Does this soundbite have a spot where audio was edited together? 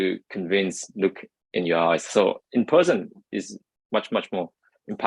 no; 0 cuts

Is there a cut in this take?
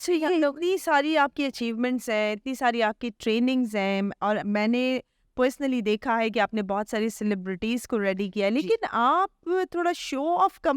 no; 0 cuts

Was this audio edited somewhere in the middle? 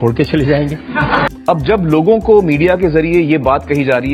yes; 1 cut; at 1.3 s

